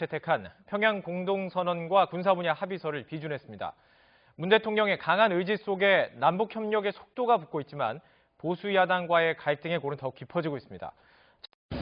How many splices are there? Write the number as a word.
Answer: zero